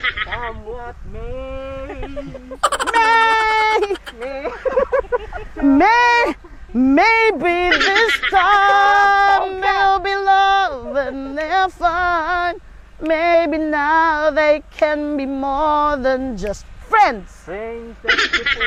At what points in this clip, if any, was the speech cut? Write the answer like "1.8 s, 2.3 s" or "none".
none